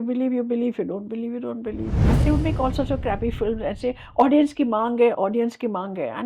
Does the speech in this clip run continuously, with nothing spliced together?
no; 1 cut; at 2.1 s

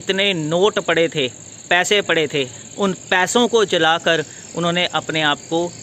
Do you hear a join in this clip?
yes; 1 cut; at 2.6 s

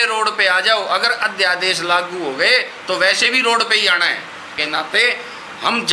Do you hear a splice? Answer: yes; 1 cut; at 4.6 s

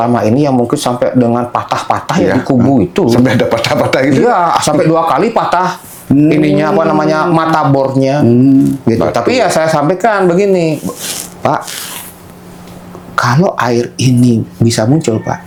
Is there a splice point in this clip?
no; 0 cuts

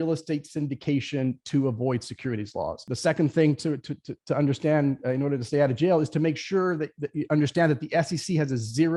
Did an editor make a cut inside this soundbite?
yes; 1 cut; at 2.8 s

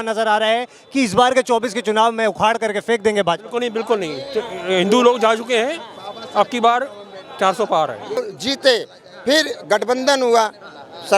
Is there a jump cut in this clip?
yes; 1 cut; at 8.2 s

